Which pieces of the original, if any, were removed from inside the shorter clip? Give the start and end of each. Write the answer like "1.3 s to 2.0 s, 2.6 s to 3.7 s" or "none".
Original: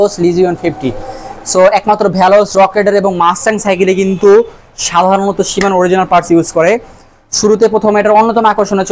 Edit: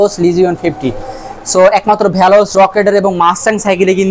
none

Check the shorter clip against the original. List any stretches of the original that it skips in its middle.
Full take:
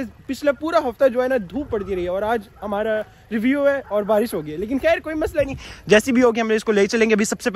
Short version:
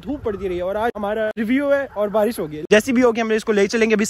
2.6 s to 3.1 s, 4.5 s to 5.7 s

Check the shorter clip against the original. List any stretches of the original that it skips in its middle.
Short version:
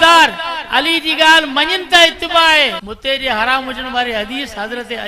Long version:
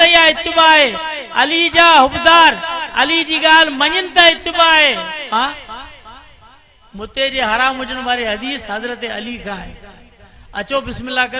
5.1 s to 7.0 s

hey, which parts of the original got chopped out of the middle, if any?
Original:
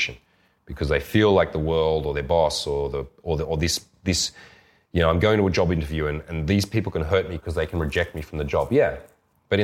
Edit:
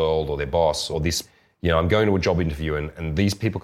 2.7 s to 4.2 s

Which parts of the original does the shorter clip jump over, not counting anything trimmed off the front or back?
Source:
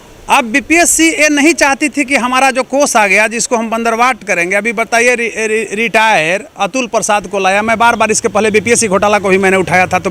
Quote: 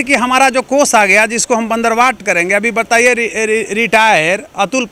none

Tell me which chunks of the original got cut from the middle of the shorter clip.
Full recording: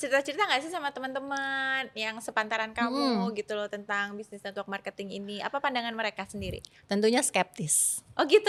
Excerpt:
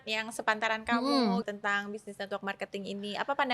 3.3 s to 3.7 s

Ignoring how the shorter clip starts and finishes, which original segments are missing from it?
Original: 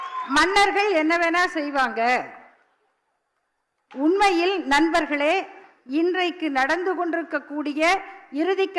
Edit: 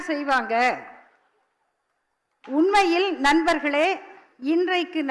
none

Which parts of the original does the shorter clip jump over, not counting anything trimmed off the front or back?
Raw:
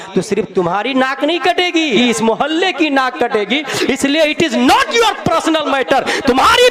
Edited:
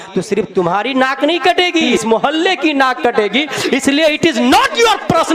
1.9 s to 2.1 s

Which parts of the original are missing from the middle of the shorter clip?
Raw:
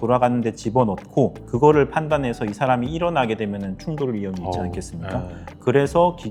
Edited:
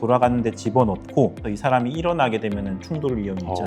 1.4 s to 2.4 s

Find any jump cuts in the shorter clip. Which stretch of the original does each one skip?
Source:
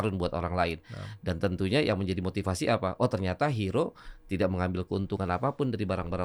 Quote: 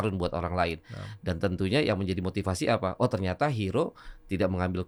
none

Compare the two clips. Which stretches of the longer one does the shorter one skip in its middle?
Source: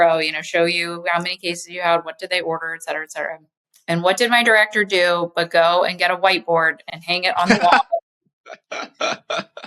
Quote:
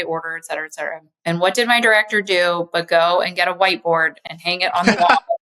3.5 s to 3.7 s

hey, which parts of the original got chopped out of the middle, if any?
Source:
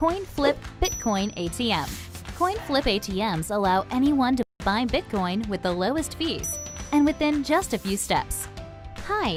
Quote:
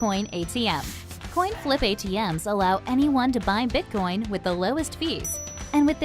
4.5 s to 4.6 s

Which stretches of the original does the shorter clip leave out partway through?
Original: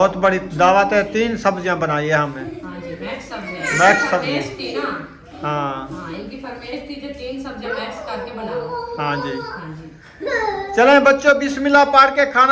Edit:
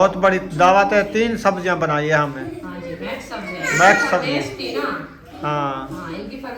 none

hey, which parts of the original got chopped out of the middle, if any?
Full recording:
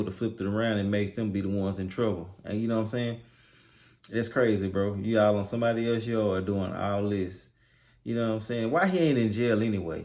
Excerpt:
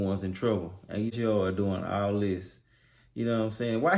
2.7 s to 6.0 s

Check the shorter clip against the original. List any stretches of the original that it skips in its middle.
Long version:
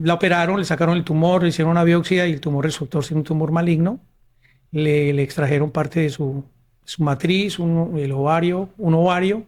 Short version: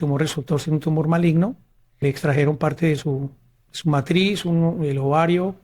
4.5 s to 5.2 s

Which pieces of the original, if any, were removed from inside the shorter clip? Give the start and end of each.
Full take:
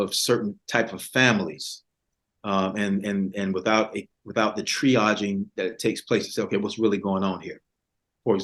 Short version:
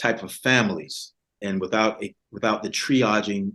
2.1 s to 3.3 s

